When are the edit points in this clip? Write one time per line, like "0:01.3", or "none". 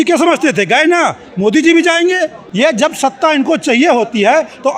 0:02.4